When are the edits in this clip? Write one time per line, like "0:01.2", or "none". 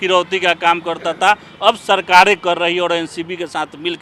none